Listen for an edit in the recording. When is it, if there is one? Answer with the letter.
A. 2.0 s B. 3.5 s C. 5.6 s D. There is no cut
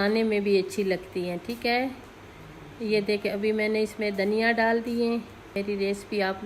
C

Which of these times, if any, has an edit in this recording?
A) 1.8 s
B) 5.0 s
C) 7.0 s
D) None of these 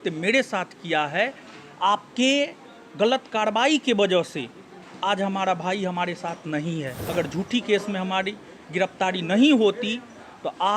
C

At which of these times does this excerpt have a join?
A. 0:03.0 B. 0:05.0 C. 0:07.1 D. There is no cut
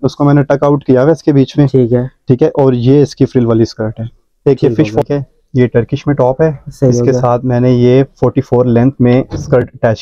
B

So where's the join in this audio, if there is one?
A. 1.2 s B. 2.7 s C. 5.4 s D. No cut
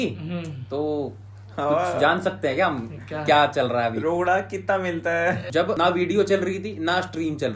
C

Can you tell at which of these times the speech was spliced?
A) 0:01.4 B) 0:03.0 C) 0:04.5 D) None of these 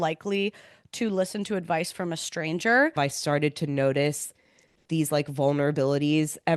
B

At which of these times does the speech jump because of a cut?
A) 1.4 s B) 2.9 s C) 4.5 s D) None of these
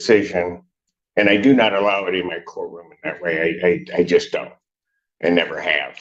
D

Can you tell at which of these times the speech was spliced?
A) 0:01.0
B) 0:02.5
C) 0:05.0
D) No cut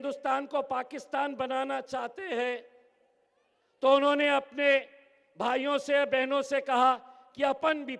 D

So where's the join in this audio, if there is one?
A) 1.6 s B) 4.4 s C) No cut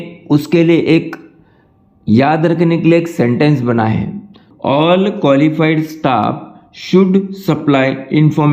B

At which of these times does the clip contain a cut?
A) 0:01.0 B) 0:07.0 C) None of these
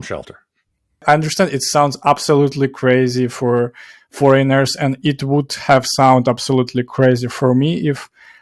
A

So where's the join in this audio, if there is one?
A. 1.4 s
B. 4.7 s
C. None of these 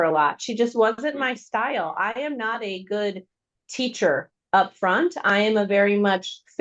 C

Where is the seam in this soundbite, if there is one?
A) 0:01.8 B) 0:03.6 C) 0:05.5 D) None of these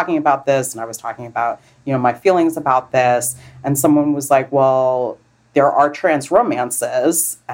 D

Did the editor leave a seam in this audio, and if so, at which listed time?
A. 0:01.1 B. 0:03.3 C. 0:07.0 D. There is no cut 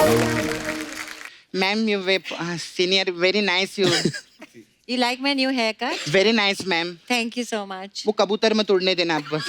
A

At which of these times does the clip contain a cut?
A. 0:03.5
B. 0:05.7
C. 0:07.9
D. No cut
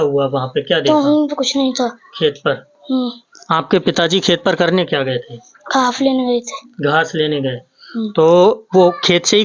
D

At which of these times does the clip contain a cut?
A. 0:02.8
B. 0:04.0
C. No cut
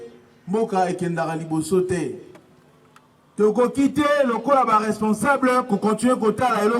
A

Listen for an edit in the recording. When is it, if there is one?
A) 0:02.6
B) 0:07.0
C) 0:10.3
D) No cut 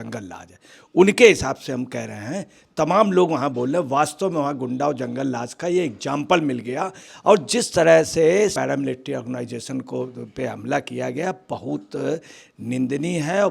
B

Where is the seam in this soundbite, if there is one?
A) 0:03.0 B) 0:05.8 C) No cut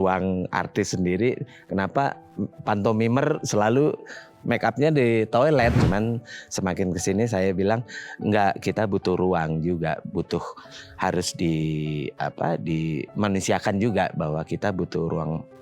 B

